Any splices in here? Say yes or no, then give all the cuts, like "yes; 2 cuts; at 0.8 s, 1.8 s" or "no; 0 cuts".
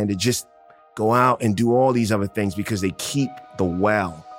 no; 0 cuts